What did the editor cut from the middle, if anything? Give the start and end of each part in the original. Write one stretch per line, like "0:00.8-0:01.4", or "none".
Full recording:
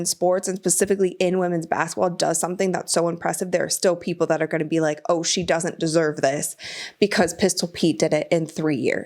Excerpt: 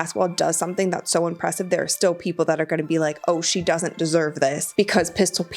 0:06.4-0:06.9